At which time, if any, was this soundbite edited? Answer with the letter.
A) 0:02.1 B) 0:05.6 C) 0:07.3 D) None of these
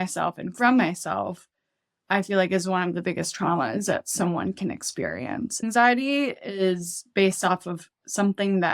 B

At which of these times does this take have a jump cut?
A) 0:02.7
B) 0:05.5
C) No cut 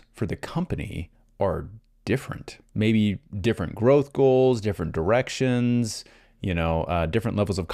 A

